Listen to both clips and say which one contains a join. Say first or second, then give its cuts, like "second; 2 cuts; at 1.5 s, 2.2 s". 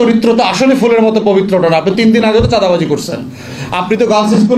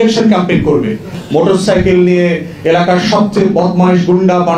second; 1 cut; at 1.1 s